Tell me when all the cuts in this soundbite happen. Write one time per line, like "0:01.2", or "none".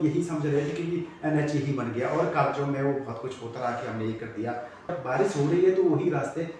0:04.9